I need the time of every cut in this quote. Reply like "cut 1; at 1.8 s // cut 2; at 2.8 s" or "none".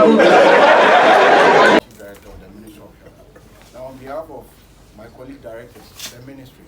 cut 1; at 1.8 s